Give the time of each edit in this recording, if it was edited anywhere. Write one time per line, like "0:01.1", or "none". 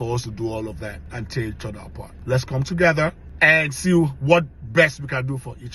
0:01.0
0:02.1